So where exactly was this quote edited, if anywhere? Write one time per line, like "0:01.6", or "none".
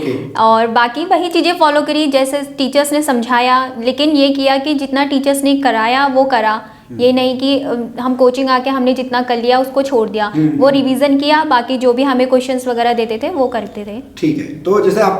none